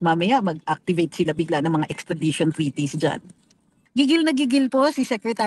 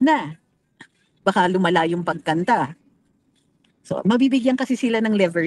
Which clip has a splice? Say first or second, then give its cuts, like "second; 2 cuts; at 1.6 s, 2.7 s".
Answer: first; 1 cut; at 3.9 s